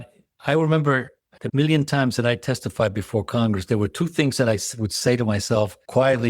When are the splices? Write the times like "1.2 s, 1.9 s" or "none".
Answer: 1.4 s